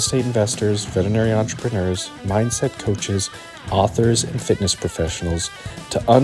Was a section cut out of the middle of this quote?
no; 0 cuts

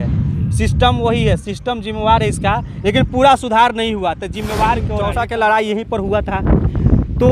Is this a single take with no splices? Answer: no; 1 cut; at 5.1 s

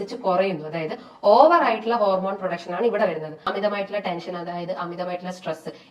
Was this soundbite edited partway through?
yes; 1 cut; at 3.4 s

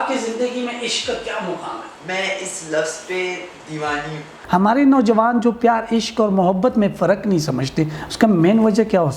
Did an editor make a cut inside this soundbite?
yes; 2 cuts; at 1.9 s, 4.3 s

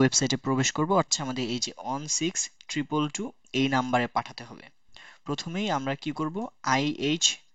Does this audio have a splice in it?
yes; 1 cut; at 1.1 s

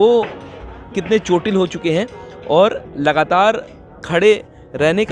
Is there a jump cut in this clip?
no; 0 cuts

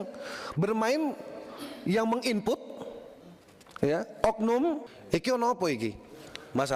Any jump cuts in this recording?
yes; 1 cut; at 4.9 s

